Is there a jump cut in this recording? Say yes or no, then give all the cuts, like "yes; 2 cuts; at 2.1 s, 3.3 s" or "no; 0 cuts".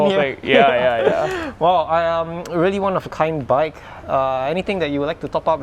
no; 0 cuts